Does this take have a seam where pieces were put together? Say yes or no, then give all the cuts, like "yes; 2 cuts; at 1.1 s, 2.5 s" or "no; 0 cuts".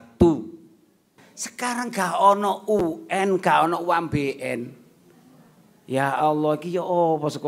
yes; 1 cut; at 1.2 s